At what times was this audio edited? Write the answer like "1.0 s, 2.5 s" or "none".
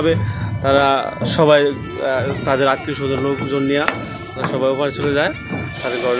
none